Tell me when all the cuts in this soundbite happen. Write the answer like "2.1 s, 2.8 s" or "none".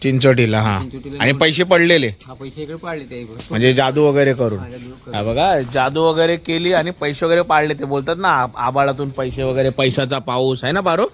none